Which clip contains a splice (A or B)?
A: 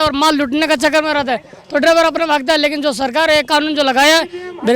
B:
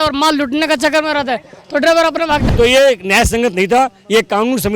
B